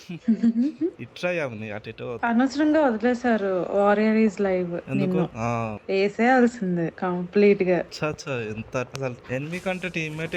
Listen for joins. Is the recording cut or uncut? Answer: cut